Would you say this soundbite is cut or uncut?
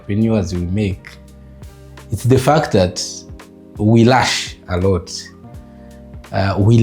uncut